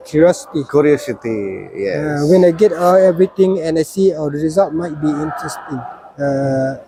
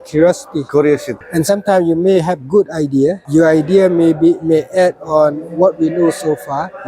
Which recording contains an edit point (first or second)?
second